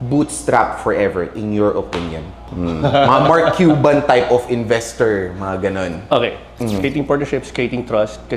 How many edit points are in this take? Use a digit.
2